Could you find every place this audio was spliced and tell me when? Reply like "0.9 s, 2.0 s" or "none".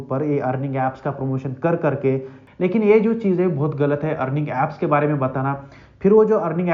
2.4 s